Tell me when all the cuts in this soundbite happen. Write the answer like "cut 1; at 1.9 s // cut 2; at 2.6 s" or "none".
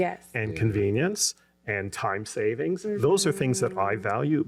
none